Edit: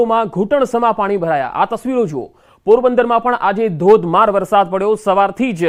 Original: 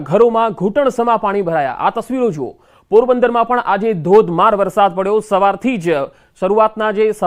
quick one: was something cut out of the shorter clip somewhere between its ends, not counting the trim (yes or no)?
no